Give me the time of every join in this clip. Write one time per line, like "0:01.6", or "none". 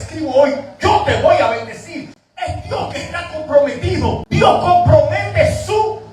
0:04.2